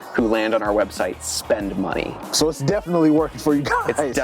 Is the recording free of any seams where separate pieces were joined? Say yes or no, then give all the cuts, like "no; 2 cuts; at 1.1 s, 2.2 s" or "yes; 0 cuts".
yes; 0 cuts